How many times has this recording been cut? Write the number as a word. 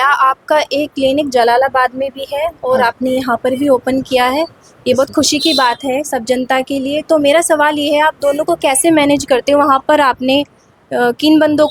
zero